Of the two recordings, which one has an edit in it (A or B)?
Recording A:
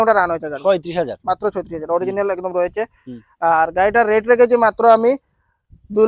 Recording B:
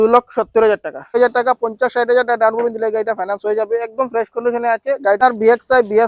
B